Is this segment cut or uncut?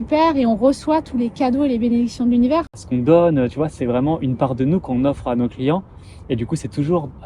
cut